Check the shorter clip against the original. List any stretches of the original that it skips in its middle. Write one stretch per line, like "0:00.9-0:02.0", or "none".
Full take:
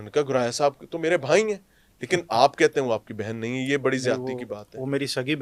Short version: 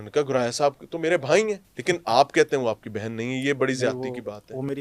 0:01.7-0:01.9

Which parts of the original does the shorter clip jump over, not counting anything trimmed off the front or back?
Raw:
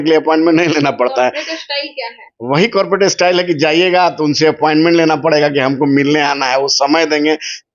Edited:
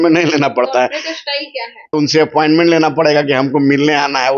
0:02.3-0:04.2

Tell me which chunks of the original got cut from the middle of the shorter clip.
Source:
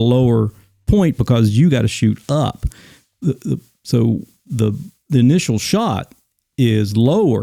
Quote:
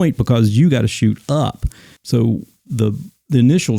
0:02.9-0:03.7

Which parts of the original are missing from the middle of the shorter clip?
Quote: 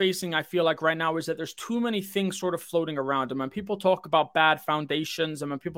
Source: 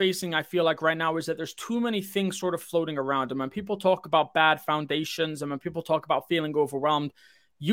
none

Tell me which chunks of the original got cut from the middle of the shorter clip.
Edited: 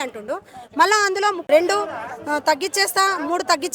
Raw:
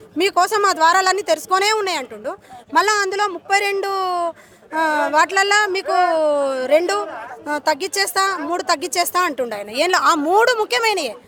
0:03.4-0:06.7

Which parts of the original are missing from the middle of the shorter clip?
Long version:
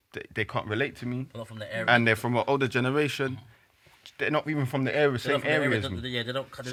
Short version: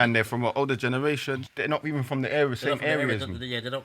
0:03.4-0:04.1

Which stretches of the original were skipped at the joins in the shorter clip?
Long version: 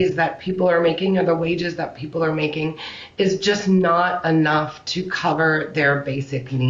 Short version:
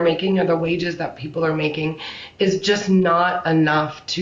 none

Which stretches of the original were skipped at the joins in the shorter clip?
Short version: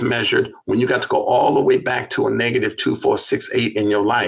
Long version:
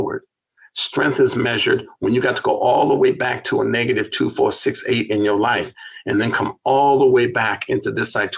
none

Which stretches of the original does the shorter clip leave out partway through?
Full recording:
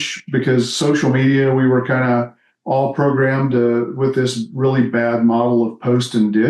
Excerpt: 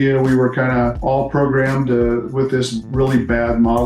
0:02.3-0:02.6

